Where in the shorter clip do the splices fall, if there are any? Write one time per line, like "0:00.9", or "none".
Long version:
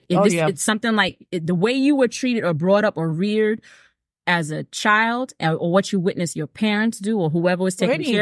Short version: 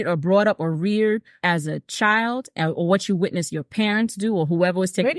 0:01.3

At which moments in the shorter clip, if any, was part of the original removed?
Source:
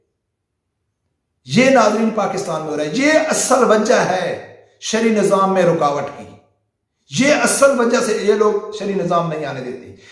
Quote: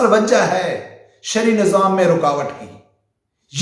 none

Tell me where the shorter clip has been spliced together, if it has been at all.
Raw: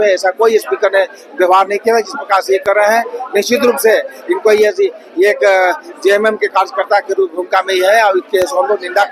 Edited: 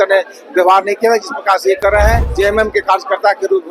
0:02.3

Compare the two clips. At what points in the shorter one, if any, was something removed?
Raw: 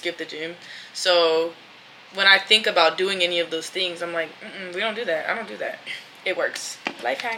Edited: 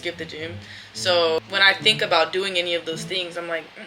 0:01.4

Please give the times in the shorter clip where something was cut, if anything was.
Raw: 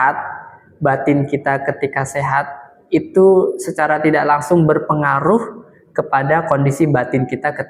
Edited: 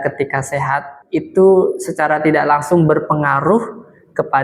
0:01.0

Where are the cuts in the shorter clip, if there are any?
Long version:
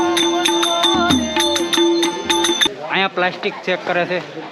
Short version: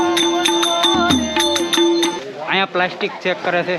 0:02.2

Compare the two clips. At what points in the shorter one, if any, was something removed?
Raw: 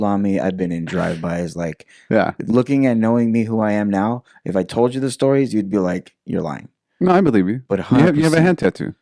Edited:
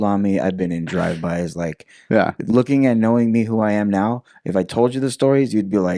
none

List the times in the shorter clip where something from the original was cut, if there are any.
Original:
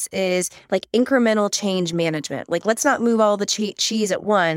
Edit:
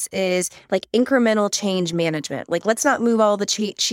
none

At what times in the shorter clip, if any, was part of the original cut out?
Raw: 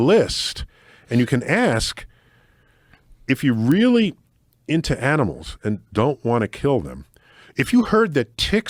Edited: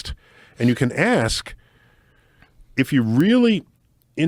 none

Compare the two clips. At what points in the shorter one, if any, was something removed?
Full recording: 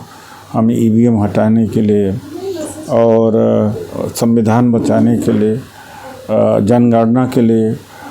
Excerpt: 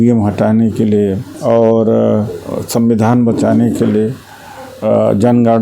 0:01.3

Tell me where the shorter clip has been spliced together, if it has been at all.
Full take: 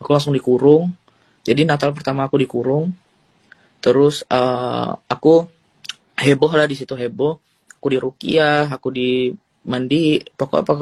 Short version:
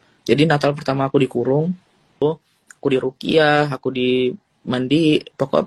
0:02.1

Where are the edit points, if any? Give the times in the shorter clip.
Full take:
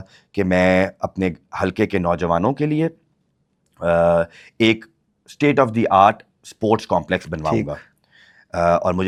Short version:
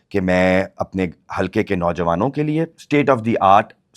0:02.8

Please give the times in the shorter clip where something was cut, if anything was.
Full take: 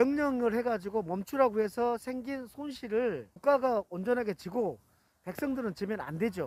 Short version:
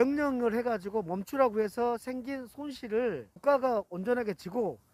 none

